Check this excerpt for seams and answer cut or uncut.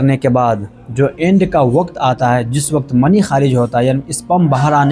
uncut